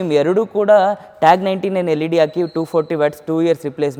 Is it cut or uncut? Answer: uncut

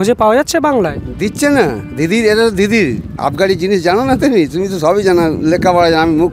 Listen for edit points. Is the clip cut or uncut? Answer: uncut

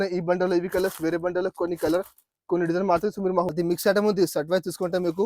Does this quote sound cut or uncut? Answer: cut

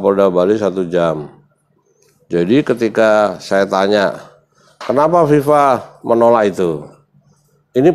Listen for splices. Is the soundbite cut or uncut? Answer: uncut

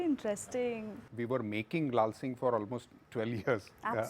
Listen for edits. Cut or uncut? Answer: cut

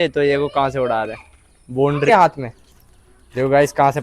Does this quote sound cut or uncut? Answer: cut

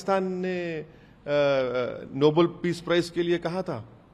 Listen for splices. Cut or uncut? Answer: uncut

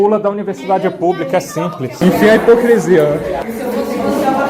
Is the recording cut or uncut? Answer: cut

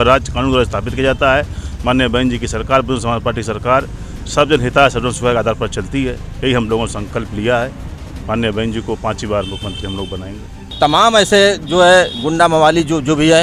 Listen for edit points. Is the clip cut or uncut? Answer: cut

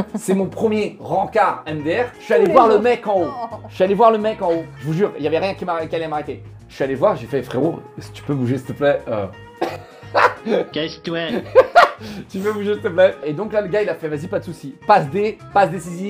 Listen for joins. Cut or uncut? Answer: uncut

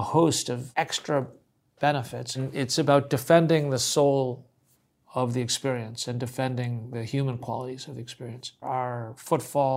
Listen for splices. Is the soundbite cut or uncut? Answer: cut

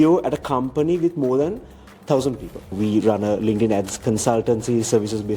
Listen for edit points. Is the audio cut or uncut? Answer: cut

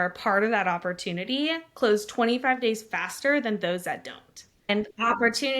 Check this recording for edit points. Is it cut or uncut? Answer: cut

